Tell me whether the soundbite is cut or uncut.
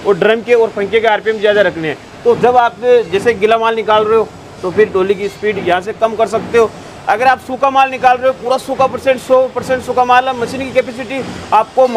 uncut